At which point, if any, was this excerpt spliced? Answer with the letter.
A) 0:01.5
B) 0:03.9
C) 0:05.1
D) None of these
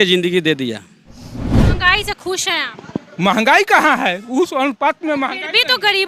A